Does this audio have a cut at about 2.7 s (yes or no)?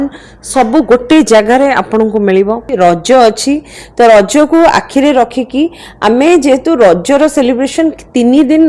yes